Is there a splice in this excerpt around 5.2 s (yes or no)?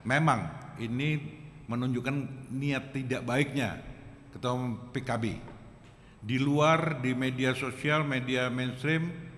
no